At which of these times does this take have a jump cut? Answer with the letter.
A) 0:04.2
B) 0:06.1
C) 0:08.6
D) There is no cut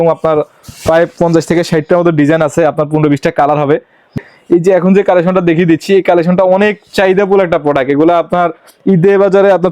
A